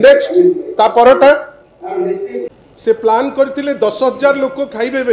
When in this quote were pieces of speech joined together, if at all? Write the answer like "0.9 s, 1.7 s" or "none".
2.4 s